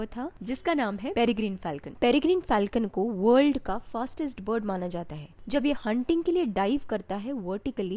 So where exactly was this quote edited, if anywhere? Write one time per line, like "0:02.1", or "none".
none